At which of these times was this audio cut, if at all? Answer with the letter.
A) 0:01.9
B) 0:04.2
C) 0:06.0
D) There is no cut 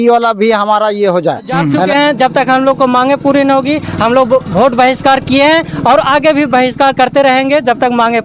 A